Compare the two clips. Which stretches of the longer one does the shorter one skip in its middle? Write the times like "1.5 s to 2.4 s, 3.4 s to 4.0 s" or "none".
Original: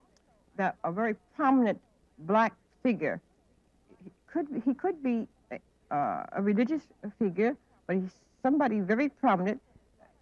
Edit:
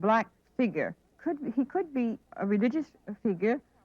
3.3 s to 4.1 s, 5.4 s to 6.3 s